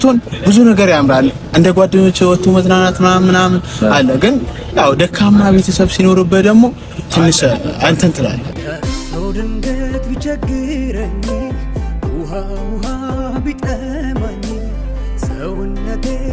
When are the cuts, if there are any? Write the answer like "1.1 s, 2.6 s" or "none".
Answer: 8.5 s